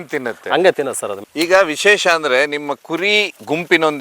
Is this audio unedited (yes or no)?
no